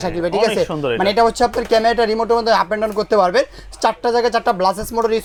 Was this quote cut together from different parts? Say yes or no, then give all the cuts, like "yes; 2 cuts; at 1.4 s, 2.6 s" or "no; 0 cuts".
no; 0 cuts